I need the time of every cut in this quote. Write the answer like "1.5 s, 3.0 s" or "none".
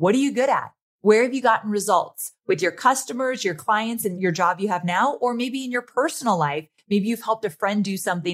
4.2 s